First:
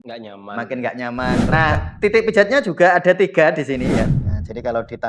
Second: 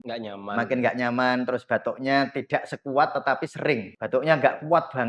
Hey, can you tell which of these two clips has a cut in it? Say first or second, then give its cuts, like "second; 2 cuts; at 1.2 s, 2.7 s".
first; 2 cuts; at 1.5 s, 4.1 s